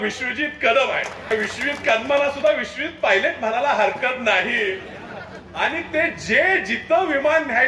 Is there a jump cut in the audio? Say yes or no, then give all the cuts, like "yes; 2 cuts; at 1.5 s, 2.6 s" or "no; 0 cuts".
yes; 1 cut; at 1.3 s